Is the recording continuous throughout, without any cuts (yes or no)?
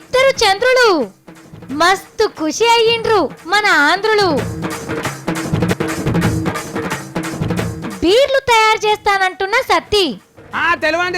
no